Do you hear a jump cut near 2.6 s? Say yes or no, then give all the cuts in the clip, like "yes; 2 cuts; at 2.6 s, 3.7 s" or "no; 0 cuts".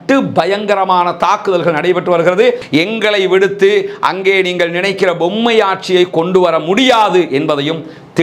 yes; 1 cut; at 2.6 s